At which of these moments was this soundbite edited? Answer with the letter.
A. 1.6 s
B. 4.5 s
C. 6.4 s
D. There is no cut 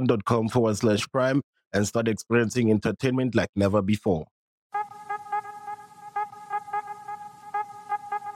B